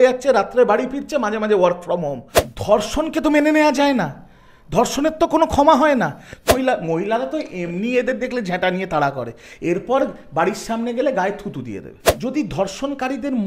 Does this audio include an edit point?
yes; 3 cuts; at 2.3 s, 6.5 s, 12.0 s

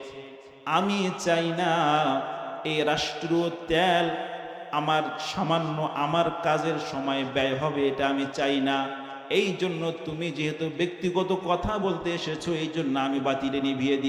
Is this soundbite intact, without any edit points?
yes; 0 cuts

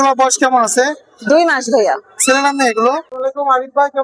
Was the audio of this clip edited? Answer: yes; 1 cut; at 3.1 s

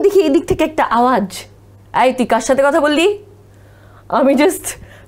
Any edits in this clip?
no; 0 cuts

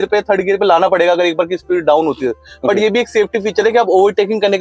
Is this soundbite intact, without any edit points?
yes; 0 cuts

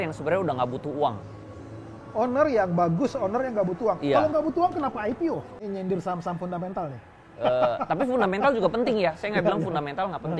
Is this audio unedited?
no; 1 cut; at 5.6 s

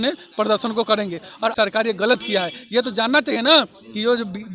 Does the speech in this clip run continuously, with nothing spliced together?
no; 1 cut; at 1.5 s

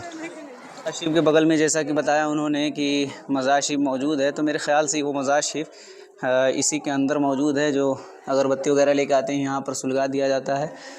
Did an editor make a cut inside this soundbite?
no; 0 cuts

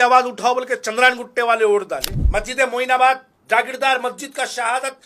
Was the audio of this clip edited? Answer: yes; 1 cut; at 2.1 s

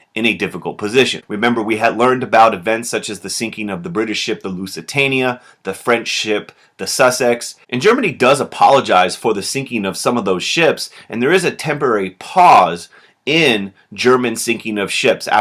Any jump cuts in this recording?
no; 0 cuts

